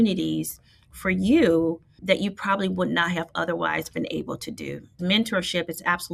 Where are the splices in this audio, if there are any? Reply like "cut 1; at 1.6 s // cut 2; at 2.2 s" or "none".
cut 1; at 2.0 s // cut 2; at 5.0 s